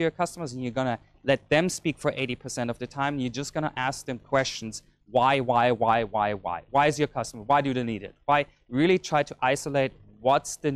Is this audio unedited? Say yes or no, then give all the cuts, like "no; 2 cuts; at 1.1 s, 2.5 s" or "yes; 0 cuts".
yes; 0 cuts